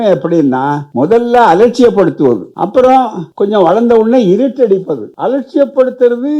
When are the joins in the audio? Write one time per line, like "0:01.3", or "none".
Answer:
0:00.8
0:02.5
0:03.2
0:05.0